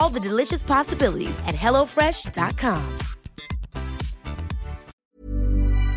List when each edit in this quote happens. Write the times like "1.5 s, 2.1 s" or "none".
4.9 s